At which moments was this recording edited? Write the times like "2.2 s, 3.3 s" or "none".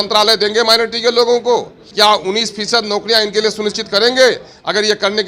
1.8 s